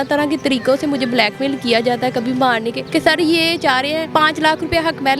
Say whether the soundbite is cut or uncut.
cut